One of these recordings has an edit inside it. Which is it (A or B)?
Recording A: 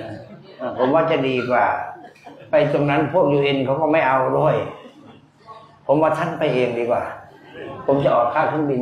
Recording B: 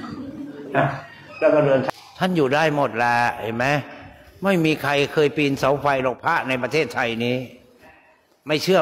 B